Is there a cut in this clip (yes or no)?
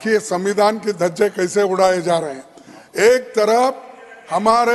no